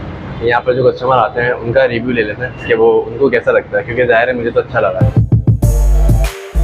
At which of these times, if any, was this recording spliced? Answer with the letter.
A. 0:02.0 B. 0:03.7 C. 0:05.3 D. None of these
C